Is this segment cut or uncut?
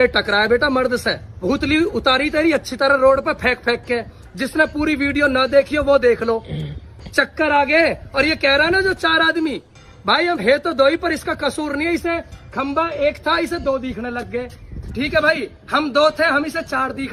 cut